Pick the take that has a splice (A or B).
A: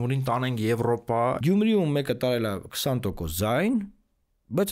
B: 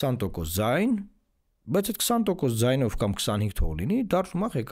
A